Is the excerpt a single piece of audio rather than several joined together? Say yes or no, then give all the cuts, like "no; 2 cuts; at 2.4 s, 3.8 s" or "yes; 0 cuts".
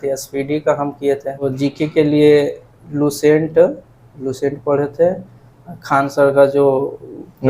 no; 1 cut; at 1.5 s